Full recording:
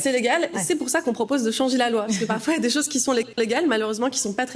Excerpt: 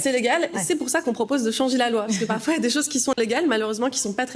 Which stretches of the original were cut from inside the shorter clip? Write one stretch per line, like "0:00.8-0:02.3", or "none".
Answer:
0:03.1-0:03.3